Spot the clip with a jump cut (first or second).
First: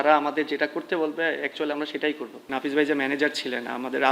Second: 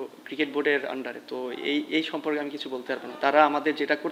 first